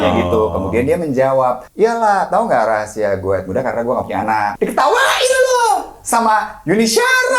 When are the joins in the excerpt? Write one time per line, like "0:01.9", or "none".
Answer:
0:01.6
0:04.5